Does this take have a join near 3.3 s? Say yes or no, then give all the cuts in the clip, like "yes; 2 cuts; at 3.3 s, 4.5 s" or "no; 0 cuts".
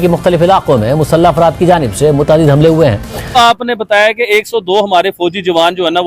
yes; 1 cut; at 3.3 s